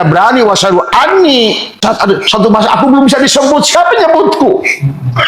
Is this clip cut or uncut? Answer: cut